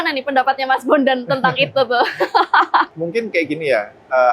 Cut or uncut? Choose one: uncut